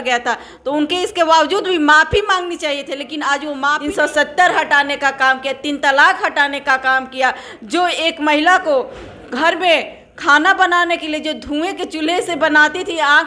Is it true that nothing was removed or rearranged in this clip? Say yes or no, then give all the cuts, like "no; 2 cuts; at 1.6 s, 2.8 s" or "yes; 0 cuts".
no; 1 cut; at 3.8 s